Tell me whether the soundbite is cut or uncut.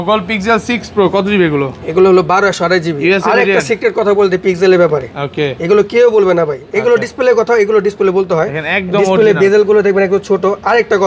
uncut